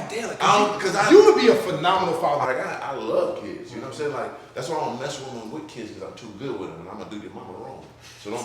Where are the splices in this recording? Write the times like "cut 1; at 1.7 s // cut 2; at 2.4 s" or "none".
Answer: cut 1; at 2.5 s